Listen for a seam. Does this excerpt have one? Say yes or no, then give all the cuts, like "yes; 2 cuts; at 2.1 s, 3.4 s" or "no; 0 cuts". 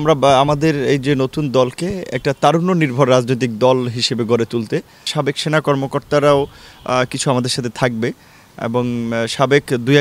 yes; 1 cut; at 5.1 s